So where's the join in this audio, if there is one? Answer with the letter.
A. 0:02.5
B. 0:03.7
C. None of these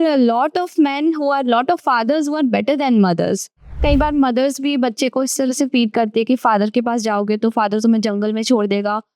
B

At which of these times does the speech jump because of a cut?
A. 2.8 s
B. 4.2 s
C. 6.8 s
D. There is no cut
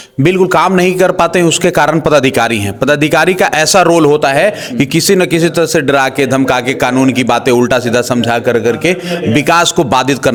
D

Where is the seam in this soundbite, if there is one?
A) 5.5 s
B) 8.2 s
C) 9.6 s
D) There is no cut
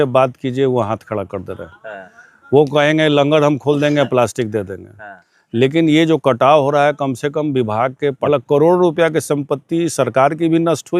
B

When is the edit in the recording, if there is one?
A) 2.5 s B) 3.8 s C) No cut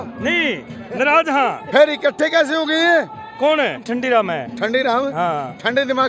B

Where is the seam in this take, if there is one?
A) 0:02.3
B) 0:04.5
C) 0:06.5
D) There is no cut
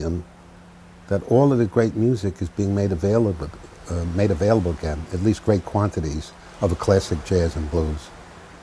A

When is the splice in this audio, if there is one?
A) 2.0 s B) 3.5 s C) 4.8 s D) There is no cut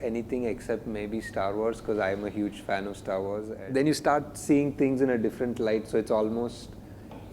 B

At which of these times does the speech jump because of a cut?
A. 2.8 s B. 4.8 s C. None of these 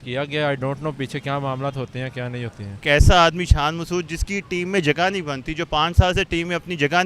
A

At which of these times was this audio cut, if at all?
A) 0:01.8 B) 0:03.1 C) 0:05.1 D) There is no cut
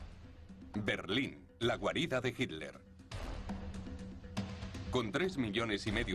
B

